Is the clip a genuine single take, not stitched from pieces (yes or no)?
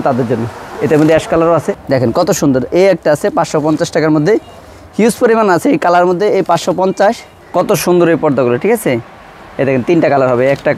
no